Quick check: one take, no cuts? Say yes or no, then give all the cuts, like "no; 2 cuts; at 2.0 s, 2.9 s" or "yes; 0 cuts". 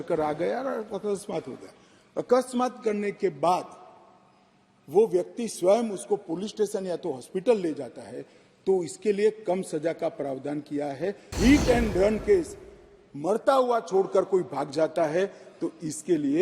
no; 1 cut; at 11.3 s